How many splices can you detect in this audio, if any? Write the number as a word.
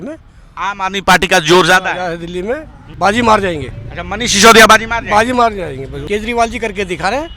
two